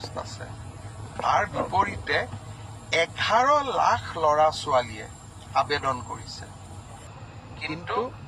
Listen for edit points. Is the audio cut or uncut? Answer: cut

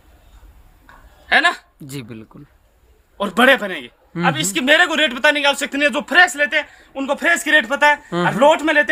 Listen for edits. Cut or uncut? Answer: uncut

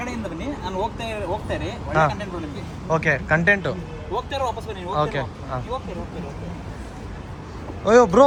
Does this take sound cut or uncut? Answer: uncut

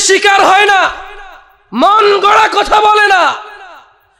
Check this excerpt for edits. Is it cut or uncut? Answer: uncut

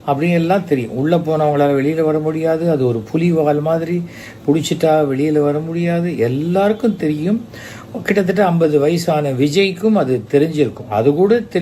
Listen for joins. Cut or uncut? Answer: uncut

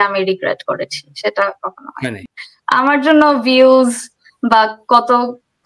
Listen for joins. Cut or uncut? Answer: cut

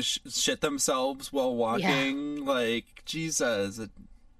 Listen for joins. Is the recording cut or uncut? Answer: uncut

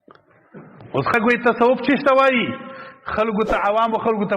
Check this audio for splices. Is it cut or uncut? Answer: cut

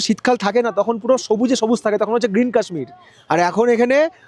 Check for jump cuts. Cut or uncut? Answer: uncut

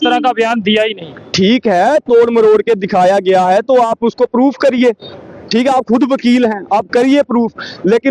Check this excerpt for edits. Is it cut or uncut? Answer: uncut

